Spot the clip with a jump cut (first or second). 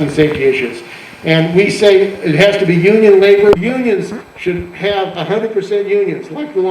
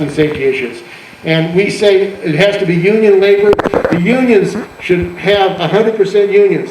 first